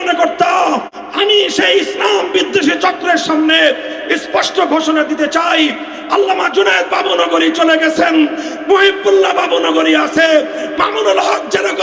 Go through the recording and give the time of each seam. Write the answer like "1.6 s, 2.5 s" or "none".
1.0 s